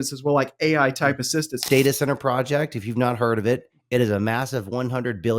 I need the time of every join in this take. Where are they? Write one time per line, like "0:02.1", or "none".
0:01.7
0:03.7

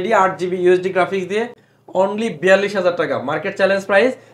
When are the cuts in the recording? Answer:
none

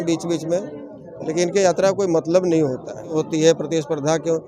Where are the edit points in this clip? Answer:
0:03.2

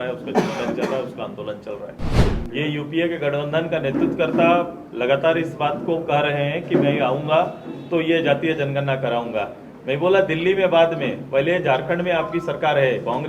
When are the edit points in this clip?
0:02.2

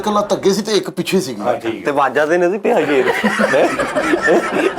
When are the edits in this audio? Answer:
none

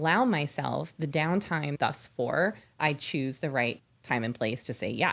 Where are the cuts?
0:01.7
0:03.9

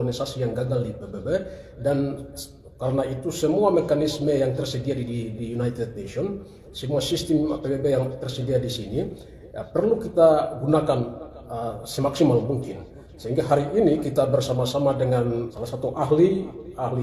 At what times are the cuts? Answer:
0:15.5

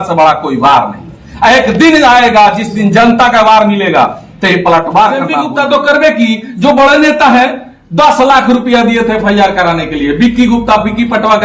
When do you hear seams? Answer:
0:05.5

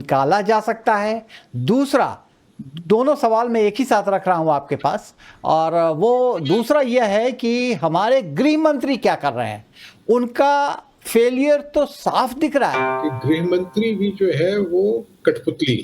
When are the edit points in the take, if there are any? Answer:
0:13.0

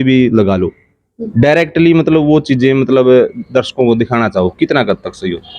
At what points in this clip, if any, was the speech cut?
none

